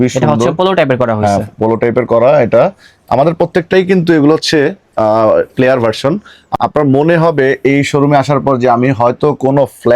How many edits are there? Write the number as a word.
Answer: one